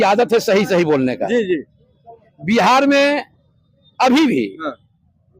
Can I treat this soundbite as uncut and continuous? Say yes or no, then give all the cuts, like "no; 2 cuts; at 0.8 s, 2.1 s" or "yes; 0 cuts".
yes; 0 cuts